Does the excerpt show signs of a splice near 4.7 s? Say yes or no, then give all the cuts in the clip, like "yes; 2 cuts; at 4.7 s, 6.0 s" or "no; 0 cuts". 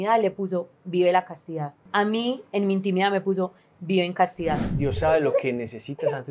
yes; 2 cuts; at 1.8 s, 4.7 s